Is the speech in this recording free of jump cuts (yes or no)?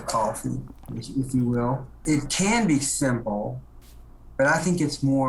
no